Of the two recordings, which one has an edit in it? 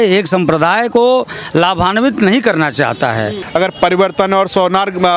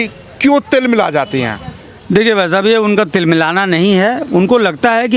first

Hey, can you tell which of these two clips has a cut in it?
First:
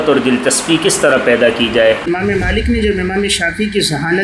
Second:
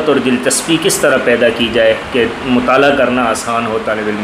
first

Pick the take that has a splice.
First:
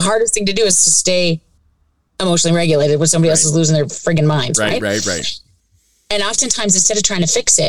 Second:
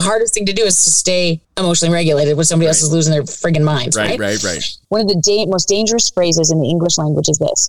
second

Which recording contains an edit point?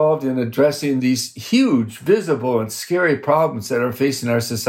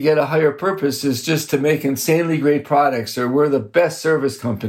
first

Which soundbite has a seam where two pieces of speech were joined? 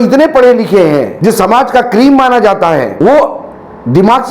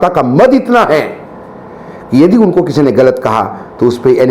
first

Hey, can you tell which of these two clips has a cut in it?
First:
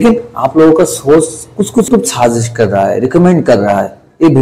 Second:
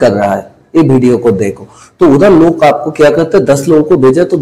first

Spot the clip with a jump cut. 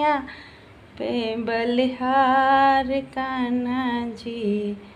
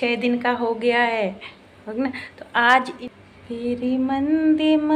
second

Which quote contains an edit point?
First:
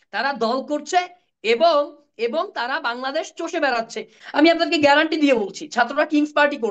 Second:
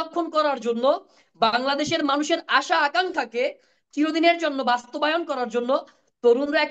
first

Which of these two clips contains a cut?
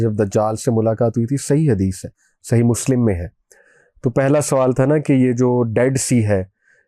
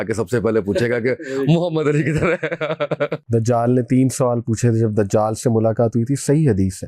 second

